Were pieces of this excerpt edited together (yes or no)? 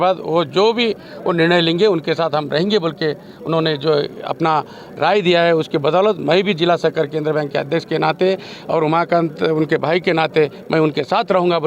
no